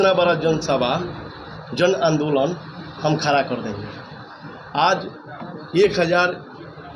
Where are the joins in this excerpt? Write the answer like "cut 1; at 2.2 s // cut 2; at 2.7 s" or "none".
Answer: none